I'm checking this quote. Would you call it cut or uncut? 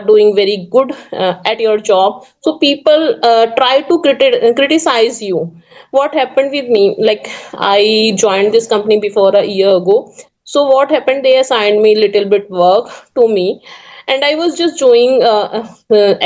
uncut